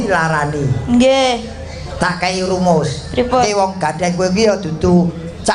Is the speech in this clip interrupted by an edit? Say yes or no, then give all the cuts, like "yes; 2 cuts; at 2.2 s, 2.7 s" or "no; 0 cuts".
yes; 1 cut; at 3.5 s